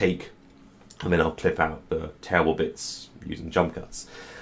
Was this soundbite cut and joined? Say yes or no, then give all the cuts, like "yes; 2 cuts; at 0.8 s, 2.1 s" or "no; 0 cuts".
no; 0 cuts